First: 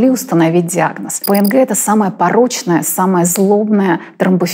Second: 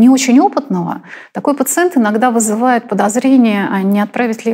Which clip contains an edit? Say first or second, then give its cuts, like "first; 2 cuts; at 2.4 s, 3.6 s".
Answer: first; 1 cut; at 1.2 s